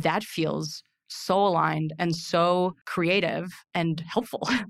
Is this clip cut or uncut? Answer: cut